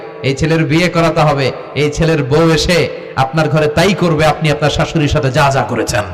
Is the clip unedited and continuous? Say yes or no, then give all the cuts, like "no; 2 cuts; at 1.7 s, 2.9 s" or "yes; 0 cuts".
yes; 0 cuts